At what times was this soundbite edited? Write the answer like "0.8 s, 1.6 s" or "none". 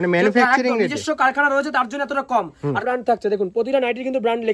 2.8 s

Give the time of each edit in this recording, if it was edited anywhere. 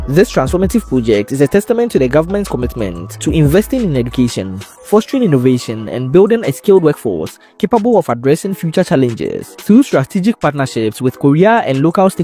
none

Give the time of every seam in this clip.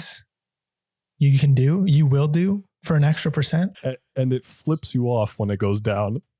3.8 s

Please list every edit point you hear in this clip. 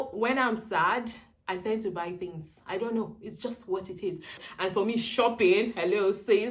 4.4 s

